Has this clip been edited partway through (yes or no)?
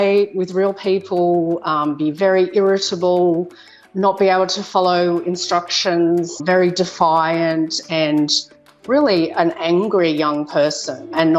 no